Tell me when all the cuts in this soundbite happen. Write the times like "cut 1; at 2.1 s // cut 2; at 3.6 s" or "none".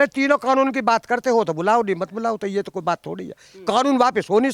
none